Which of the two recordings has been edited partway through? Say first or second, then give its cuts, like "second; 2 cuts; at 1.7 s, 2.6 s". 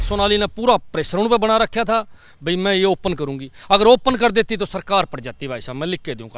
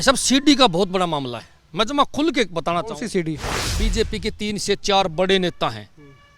second; 1 cut; at 3.6 s